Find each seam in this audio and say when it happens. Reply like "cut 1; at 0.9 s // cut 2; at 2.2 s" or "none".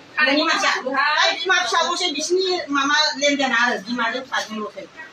none